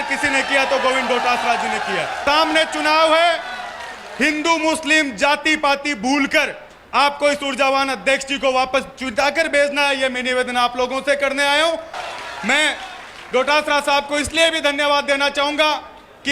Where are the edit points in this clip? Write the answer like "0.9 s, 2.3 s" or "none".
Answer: 2.2 s, 11.9 s